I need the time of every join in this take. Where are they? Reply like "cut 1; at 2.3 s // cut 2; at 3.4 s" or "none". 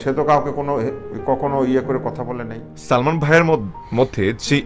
cut 1; at 2.6 s